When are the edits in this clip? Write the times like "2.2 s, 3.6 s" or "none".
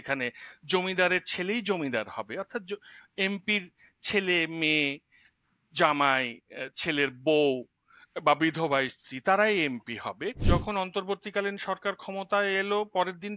10.4 s